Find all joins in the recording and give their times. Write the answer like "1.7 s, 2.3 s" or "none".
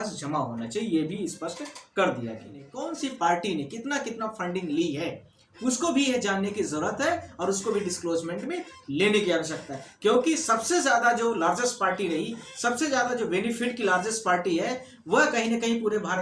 2.7 s

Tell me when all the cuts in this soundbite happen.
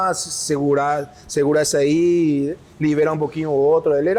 none

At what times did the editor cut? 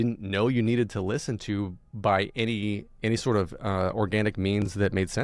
none

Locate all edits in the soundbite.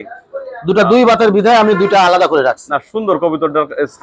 none

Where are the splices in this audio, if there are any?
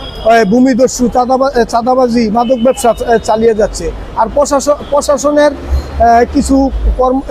none

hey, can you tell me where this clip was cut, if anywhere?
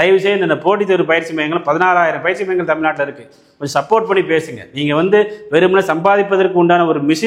none

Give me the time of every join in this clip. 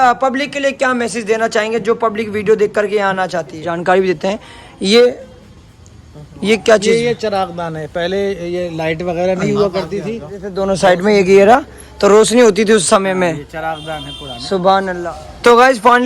3.7 s, 10.4 s, 15.0 s

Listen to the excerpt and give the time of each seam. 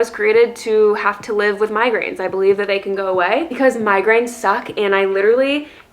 3.5 s

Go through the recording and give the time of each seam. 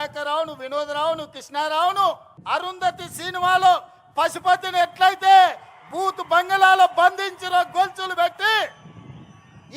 2.3 s

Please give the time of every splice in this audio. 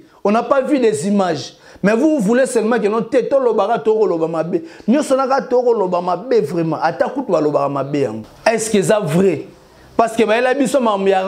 8.2 s

